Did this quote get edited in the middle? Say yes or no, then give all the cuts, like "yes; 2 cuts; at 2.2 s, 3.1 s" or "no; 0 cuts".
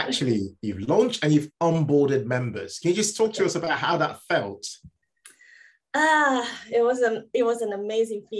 no; 0 cuts